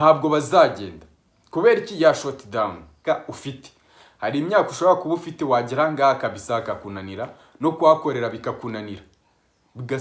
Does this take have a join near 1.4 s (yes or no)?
no